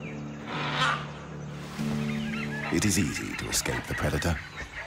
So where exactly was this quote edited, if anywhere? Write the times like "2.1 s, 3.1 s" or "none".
1.5 s